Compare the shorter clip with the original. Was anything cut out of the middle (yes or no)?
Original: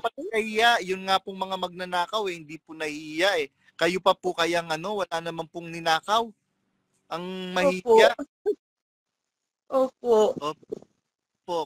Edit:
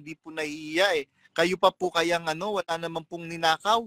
no